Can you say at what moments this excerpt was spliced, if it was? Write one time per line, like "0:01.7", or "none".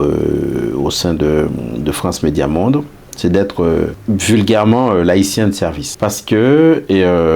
0:04.0
0:05.9